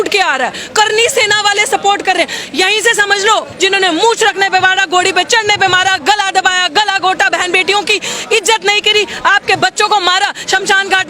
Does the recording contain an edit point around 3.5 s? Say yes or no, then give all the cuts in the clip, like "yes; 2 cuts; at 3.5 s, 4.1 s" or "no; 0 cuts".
yes; 1 cut; at 3.5 s